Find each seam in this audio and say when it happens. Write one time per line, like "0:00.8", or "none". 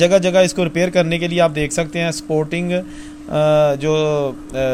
none